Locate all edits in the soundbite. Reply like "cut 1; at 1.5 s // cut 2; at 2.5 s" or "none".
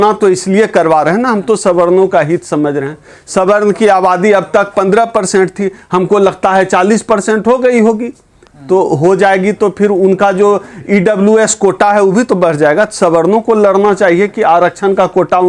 none